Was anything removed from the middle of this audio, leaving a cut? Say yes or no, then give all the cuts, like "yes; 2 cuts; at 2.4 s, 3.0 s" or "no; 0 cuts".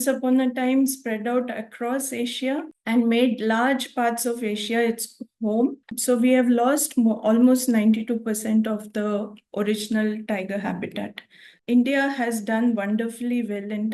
yes; 2 cuts; at 5.9 s, 11.6 s